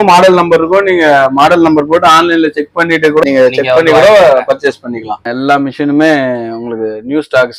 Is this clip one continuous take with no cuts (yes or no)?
no